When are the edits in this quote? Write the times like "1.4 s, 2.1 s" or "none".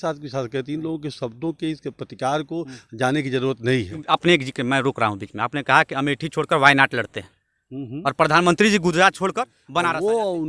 4.0 s, 9.6 s